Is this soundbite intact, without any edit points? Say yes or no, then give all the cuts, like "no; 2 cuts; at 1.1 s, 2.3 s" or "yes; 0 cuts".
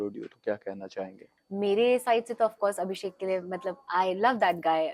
no; 1 cut; at 1.3 s